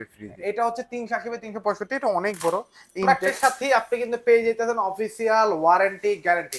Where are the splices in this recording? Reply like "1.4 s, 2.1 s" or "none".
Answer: 3.1 s